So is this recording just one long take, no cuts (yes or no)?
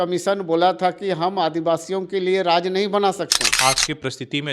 no